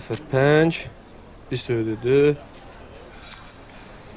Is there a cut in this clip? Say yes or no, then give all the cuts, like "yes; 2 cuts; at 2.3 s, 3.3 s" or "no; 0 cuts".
yes; 1 cut; at 2.4 s